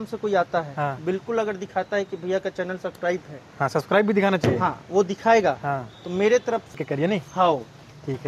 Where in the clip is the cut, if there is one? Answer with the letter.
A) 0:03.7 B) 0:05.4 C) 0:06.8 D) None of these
C